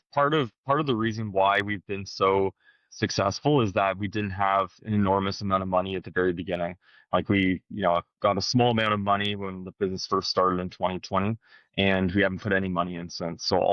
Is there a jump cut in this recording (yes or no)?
no